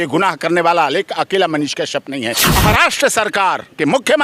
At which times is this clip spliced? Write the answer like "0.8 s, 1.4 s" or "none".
2.5 s

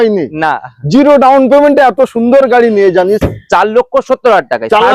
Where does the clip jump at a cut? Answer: 3.2 s

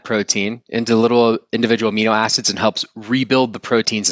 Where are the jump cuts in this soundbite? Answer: none

